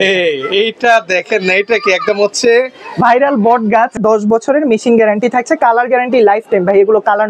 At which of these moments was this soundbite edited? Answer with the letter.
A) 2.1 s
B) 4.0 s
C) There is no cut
B